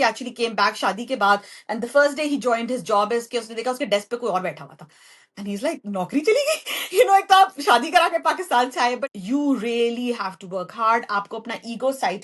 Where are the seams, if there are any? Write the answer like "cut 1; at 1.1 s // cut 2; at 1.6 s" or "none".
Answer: cut 1; at 9.0 s